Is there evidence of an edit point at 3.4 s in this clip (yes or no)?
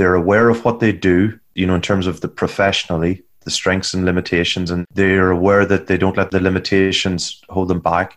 no